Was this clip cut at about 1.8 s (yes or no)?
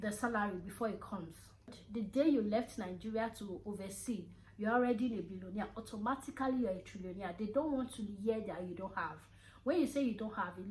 yes